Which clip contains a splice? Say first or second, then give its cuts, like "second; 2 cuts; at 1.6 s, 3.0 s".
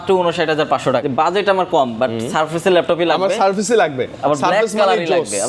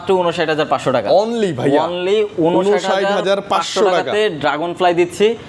first; 1 cut; at 1.0 s